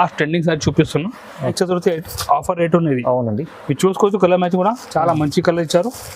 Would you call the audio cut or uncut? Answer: cut